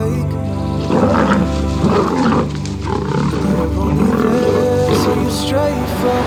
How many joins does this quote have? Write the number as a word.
zero